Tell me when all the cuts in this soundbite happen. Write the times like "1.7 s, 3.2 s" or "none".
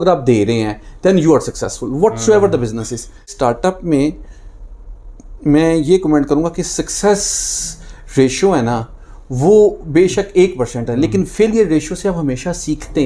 3.3 s